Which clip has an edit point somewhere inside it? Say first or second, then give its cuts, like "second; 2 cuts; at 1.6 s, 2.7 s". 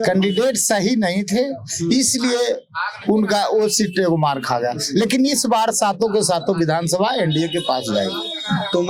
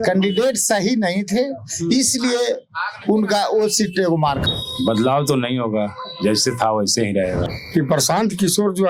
second; 2 cuts; at 4.4 s, 7.5 s